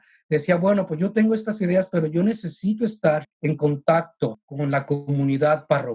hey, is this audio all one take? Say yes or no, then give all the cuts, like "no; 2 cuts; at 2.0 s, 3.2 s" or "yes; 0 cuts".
no; 2 cuts; at 3.3 s, 4.5 s